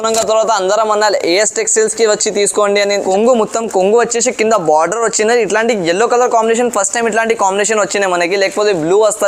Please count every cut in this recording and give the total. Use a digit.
1